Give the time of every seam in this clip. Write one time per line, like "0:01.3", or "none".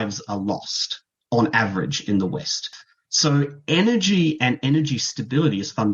0:02.8